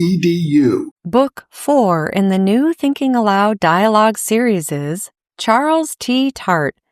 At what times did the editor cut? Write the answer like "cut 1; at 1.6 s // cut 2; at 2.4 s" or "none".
cut 1; at 1.0 s